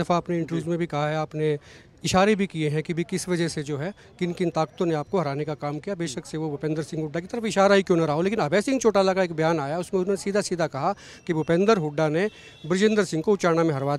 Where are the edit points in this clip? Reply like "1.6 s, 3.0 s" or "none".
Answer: none